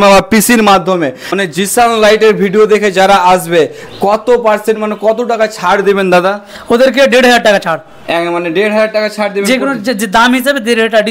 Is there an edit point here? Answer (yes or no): yes